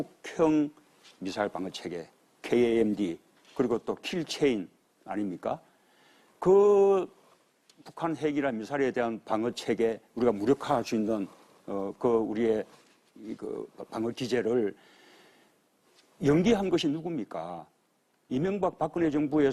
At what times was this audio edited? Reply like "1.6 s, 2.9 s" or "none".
17.3 s